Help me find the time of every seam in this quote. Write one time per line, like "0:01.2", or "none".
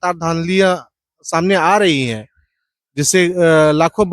none

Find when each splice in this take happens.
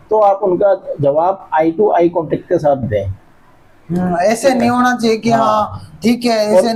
none

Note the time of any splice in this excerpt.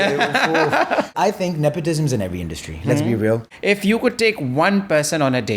0:01.1
0:03.5

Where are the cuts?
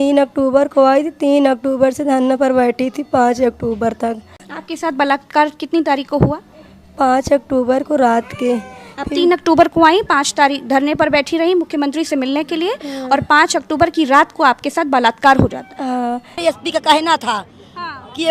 0:04.5
0:16.4

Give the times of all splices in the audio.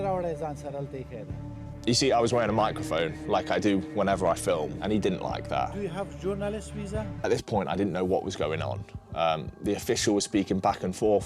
0:07.2

